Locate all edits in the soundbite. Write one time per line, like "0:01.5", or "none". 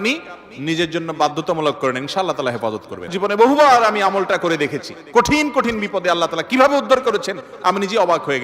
0:03.1